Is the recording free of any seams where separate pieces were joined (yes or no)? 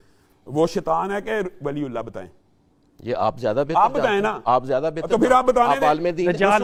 yes